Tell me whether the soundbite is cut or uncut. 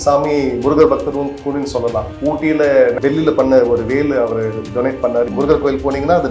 cut